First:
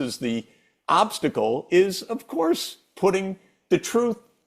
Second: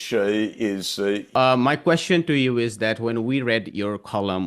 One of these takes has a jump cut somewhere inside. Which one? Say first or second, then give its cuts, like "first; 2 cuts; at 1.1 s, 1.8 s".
second; 1 cut; at 1.3 s